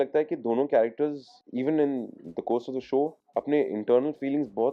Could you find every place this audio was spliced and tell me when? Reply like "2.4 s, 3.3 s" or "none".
none